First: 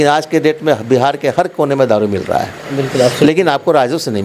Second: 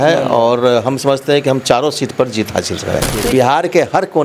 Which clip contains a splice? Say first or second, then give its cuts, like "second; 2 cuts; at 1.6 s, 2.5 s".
second; 1 cut; at 3.1 s